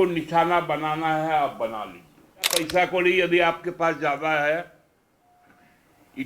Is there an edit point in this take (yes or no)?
yes